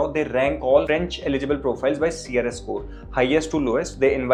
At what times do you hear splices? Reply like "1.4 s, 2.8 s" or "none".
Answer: none